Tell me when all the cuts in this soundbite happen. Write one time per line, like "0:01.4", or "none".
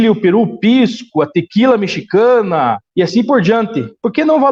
none